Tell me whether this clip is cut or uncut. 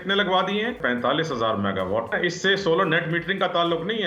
cut